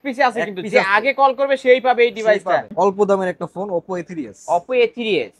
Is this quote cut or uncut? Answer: cut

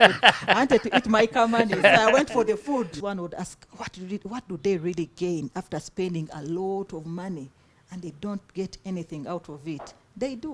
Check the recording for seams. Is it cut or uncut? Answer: cut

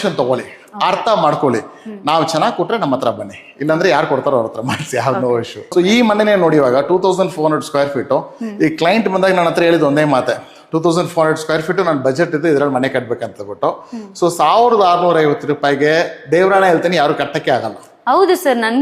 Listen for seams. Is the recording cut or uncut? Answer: cut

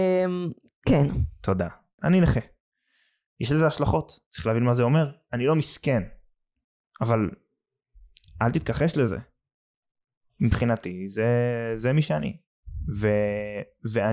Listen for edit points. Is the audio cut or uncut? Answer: cut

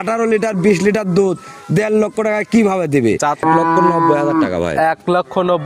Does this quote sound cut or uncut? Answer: cut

